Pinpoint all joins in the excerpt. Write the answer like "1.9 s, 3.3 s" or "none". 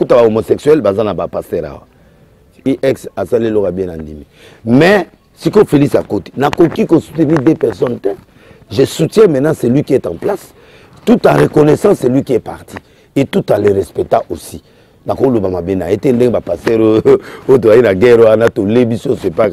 2.6 s